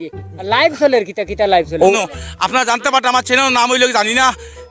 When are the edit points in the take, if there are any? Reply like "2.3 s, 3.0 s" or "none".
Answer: 1.9 s

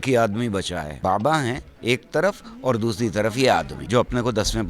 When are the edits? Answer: 0.9 s, 1.7 s, 3.8 s

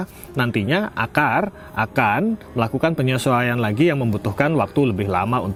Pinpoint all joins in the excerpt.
none

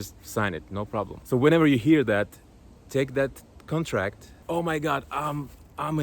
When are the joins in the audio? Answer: 1.2 s, 4.4 s

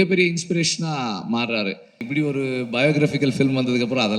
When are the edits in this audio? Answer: 2.0 s

